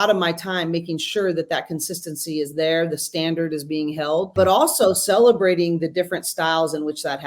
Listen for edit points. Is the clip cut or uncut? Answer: cut